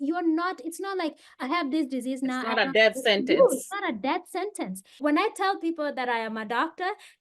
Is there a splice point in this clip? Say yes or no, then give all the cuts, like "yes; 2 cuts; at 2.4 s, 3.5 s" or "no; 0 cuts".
yes; 1 cut; at 5.0 s